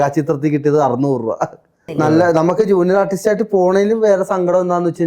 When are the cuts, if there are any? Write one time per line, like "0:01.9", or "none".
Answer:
0:01.8